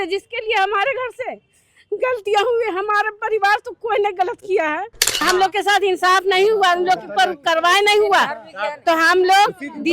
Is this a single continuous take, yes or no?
no